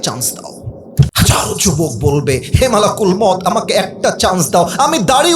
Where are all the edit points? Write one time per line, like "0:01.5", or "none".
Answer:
0:01.1